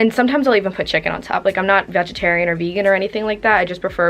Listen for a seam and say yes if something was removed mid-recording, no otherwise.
no